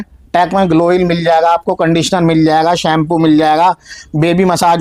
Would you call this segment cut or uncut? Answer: uncut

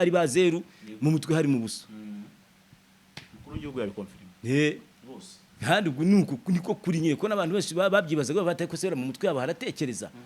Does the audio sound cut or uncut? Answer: uncut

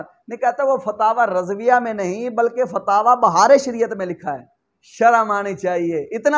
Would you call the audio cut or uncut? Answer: uncut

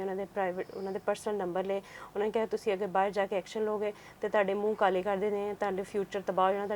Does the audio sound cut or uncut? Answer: uncut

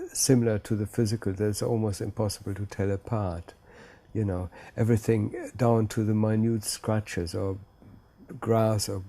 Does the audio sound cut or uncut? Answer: uncut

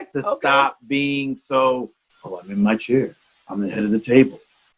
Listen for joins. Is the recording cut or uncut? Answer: uncut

